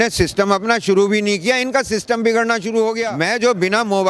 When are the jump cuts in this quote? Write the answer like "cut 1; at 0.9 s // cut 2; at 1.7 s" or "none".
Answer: cut 1; at 3.1 s